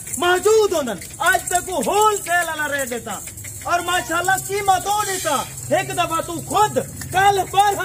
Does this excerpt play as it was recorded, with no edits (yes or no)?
yes